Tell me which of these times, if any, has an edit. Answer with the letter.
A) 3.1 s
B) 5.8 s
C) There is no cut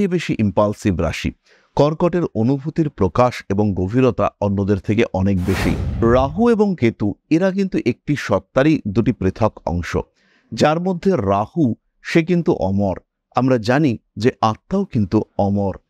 B